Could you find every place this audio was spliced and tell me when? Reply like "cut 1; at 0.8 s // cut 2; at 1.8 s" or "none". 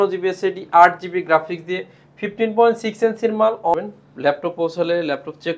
cut 1; at 3.8 s